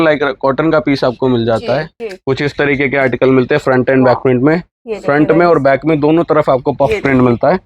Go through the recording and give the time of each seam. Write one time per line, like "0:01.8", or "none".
0:02.0